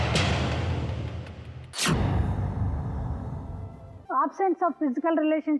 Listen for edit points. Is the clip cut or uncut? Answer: cut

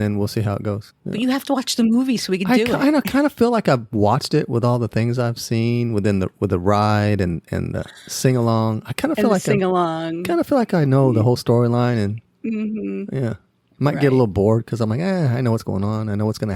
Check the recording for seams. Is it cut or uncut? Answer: cut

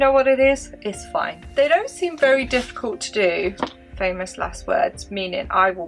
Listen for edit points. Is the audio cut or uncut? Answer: cut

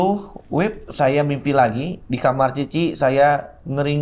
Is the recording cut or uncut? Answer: uncut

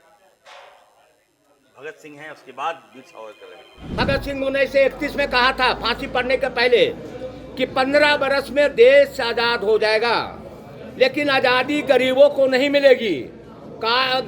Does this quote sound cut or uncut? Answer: cut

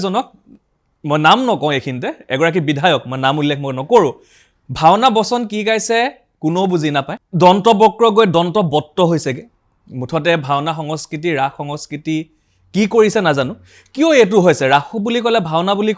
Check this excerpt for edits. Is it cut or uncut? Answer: cut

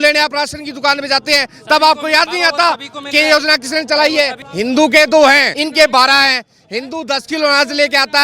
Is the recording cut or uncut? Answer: cut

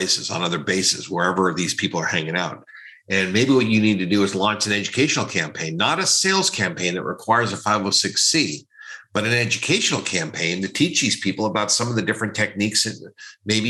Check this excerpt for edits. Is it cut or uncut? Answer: uncut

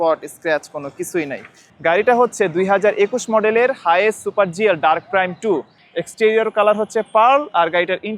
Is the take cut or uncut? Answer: cut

